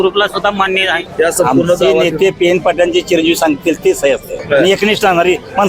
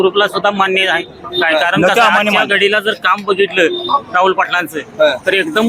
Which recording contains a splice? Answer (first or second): first